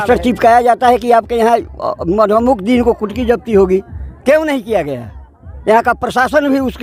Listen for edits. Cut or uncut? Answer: uncut